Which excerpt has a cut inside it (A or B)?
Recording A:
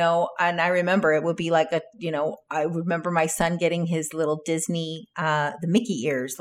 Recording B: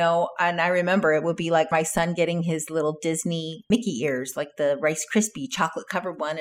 B